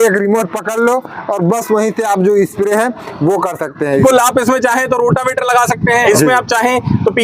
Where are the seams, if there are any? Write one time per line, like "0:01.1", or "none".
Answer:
0:03.9
0:06.0